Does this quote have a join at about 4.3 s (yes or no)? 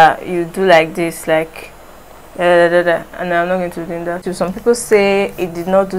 yes